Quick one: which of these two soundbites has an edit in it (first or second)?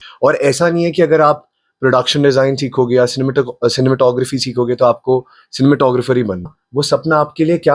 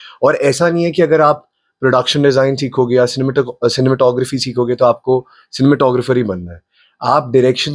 first